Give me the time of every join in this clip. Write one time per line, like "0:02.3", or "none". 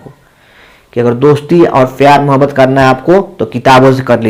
none